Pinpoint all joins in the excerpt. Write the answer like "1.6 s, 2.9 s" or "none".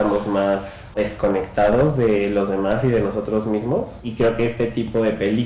1.0 s, 4.0 s